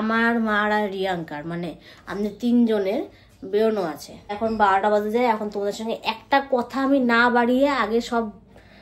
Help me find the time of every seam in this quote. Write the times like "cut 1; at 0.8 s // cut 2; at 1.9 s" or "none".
cut 1; at 4.4 s

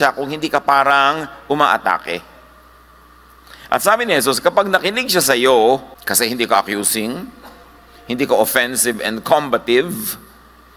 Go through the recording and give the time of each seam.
cut 1; at 5.9 s

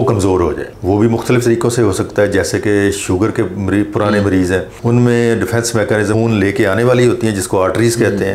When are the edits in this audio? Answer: cut 1; at 6.1 s

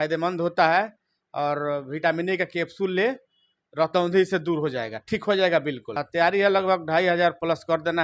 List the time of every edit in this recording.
cut 1; at 5.9 s

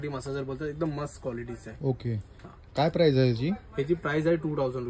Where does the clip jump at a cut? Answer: none

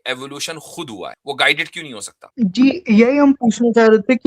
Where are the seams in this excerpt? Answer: cut 1; at 1.2 s // cut 2; at 2.1 s

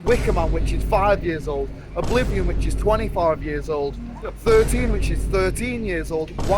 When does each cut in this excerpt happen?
none

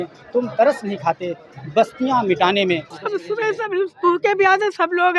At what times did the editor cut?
cut 1; at 2.9 s

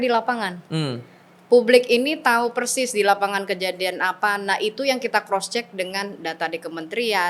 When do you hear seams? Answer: none

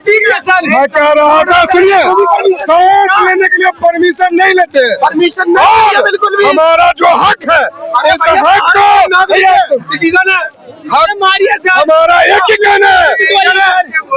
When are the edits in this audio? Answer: none

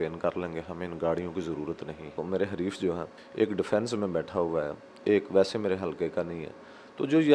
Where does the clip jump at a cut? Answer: cut 1; at 2.1 s // cut 2; at 3.2 s

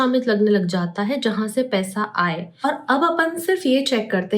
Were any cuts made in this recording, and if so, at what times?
cut 1; at 2.5 s

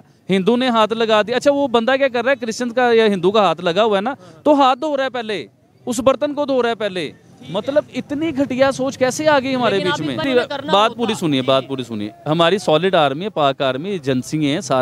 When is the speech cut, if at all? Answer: cut 1; at 10.3 s

